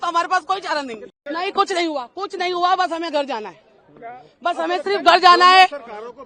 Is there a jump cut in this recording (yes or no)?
yes